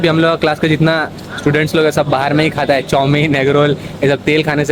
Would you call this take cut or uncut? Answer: uncut